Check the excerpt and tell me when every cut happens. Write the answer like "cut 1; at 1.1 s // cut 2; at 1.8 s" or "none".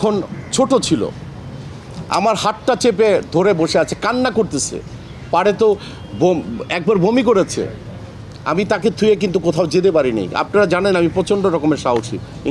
none